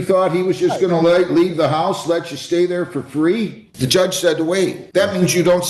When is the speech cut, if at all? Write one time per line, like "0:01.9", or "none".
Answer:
0:03.6
0:04.8